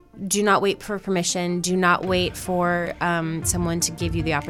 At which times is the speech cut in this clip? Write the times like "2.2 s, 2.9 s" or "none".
none